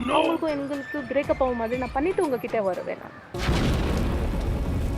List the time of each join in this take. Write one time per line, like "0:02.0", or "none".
0:03.0